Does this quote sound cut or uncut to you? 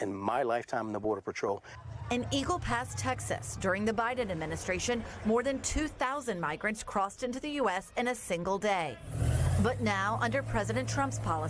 cut